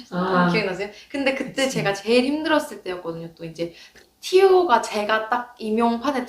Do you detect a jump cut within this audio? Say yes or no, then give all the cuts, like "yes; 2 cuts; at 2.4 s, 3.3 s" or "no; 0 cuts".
yes; 1 cut; at 3.9 s